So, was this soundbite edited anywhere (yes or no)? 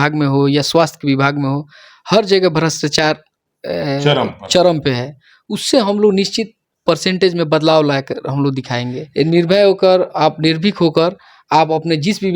yes